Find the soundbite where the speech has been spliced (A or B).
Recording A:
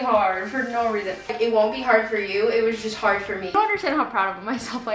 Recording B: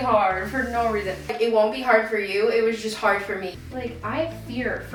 A